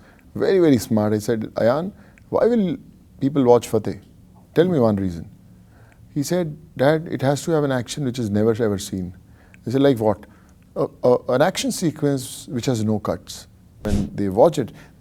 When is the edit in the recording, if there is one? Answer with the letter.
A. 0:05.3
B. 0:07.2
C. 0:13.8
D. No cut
C